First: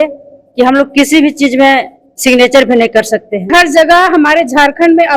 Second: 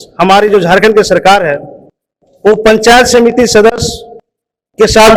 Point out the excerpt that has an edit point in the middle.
first; 1 cut; at 3.5 s

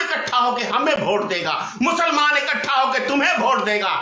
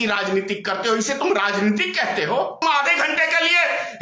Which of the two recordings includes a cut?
second; 1 cut; at 2.6 s

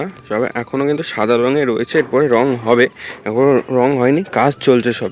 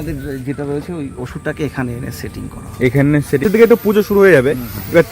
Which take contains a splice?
second; 1 cut; at 3.4 s

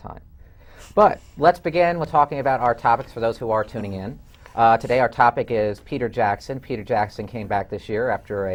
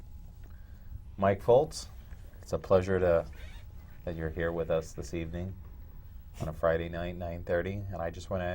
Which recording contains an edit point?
second; 1 cut; at 7.1 s

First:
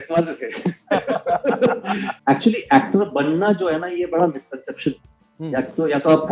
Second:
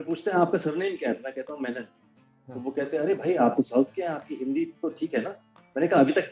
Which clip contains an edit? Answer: first; 1 cut; at 2.1 s

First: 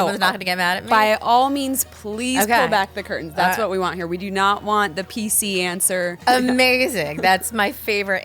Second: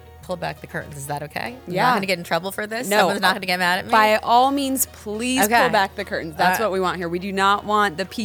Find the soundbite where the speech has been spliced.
first; 1 cut; at 6.2 s

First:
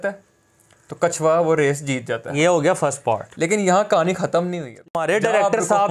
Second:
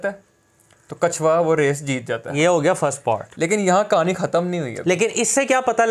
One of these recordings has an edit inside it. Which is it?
first; 1 cut; at 4.9 s

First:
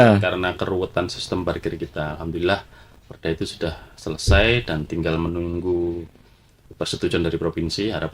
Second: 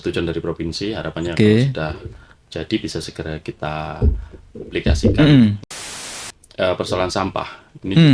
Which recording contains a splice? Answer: second; 1 cut; at 5.9 s

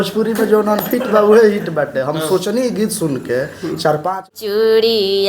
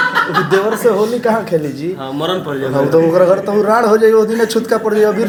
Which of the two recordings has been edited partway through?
first; 1 cut; at 4.3 s

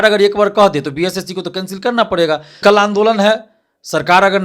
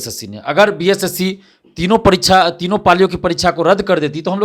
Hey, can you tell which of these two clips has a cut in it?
first; 1 cut; at 2.6 s

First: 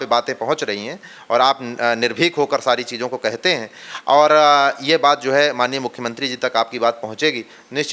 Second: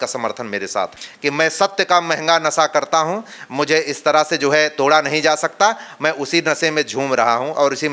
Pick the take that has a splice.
second; 1 cut; at 0.9 s

